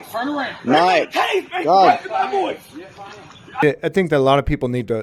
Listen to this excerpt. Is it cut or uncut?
cut